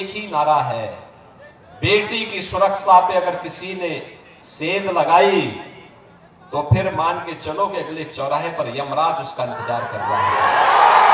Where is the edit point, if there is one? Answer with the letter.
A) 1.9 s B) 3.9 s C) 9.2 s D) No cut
D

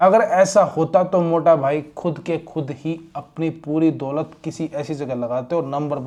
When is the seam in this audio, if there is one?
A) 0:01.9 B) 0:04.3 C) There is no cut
C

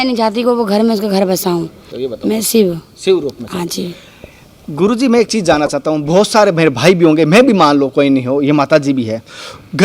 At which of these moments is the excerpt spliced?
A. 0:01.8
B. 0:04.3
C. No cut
A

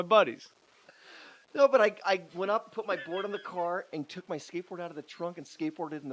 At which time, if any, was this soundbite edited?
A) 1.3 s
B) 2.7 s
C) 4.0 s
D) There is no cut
A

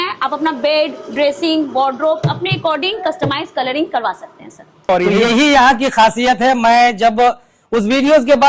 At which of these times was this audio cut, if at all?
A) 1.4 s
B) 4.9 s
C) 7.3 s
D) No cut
B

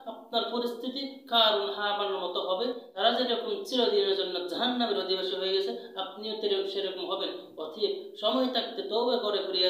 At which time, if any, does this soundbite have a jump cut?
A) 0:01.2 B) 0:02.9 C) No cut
B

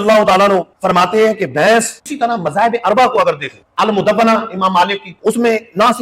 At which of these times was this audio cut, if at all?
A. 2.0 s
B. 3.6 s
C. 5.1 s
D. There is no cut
A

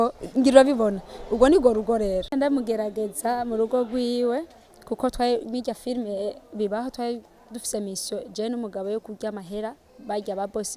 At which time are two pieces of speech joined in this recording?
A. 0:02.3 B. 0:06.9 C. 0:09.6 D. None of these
A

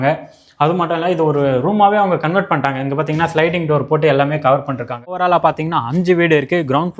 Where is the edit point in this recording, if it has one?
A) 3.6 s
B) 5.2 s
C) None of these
B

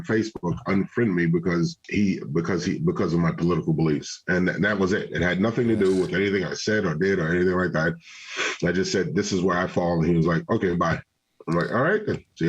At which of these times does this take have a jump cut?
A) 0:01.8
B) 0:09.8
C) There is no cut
A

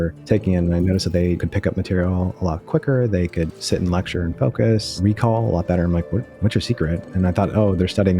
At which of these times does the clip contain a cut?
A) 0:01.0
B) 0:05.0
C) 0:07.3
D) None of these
B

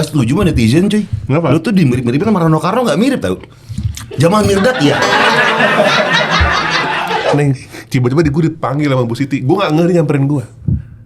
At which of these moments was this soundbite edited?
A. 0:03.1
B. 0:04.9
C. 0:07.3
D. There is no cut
C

